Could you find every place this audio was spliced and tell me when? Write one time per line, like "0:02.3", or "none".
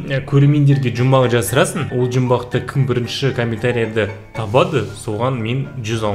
0:01.9